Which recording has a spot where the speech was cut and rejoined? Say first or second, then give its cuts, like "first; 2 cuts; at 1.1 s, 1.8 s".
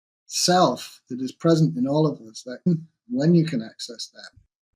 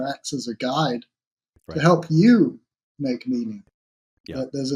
first; 1 cut; at 2.7 s